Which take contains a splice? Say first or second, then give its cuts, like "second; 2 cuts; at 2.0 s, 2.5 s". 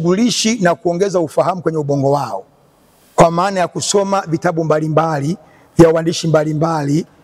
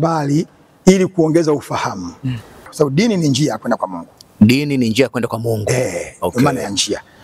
second; 1 cut; at 2.7 s